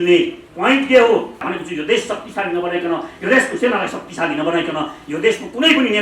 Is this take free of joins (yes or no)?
no